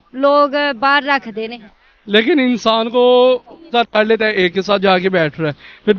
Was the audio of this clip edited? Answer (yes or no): yes